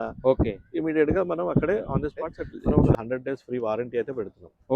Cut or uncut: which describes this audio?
cut